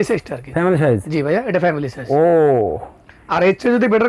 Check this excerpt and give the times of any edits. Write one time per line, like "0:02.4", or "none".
none